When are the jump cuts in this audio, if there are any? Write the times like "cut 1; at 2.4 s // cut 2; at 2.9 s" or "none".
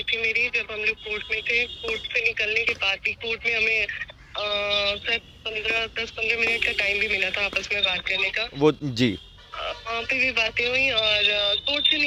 none